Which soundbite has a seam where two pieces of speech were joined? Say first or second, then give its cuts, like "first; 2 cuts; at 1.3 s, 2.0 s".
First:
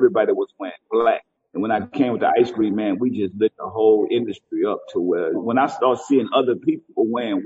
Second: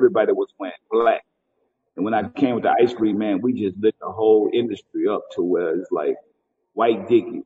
first; 2 cuts; at 1.4 s, 5.4 s